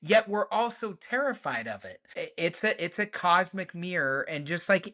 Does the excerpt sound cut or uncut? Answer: cut